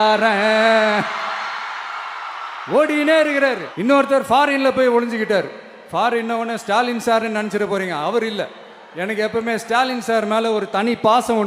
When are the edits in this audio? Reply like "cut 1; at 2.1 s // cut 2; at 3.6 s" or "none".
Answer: cut 1; at 3.7 s

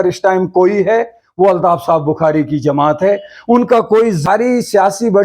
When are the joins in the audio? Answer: cut 1; at 4.2 s

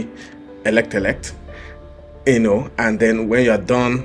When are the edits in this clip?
none

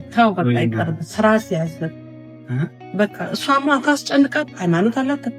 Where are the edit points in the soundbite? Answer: none

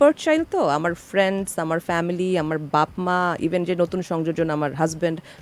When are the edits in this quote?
none

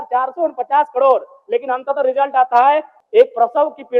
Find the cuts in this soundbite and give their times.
cut 1; at 2.9 s

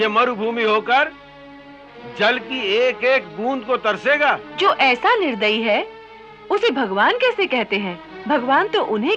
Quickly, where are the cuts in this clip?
cut 1; at 4.5 s // cut 2; at 8.1 s

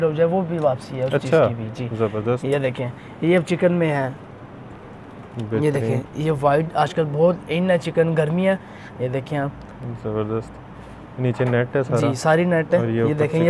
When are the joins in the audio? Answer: none

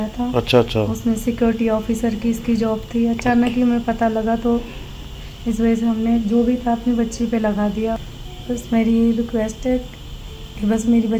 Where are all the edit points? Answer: cut 1; at 8.0 s

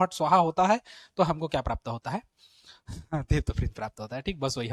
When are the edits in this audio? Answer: none

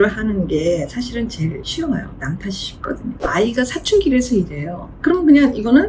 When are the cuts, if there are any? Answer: cut 1; at 1.6 s // cut 2; at 4.9 s

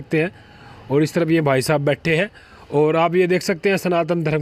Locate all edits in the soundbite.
none

